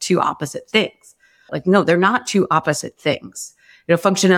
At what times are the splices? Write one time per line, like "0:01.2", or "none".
0:01.4